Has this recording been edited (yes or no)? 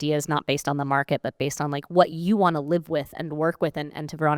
no